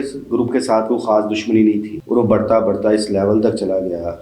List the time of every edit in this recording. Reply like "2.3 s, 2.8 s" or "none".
2.0 s